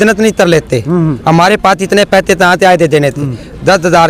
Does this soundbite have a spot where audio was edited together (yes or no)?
no